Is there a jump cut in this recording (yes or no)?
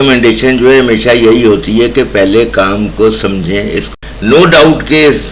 yes